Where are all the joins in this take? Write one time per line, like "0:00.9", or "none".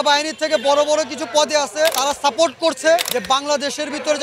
0:02.0
0:03.1